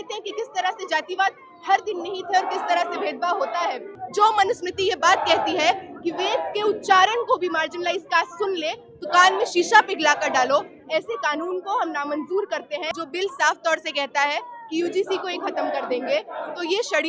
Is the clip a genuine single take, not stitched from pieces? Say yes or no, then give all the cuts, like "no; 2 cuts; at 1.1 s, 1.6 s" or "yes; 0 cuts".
no; 2 cuts; at 4.0 s, 12.9 s